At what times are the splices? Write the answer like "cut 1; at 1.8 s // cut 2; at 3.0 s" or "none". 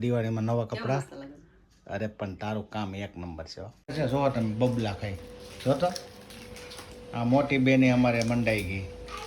cut 1; at 3.9 s